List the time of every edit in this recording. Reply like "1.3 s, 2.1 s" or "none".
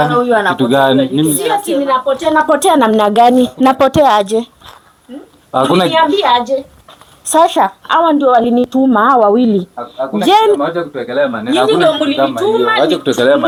none